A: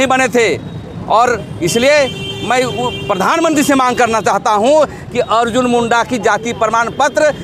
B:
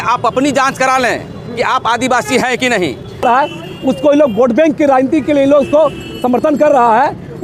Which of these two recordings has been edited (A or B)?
B